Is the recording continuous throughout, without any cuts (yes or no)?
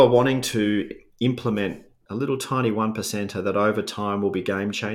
no